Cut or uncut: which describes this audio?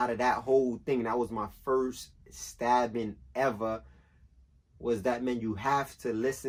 uncut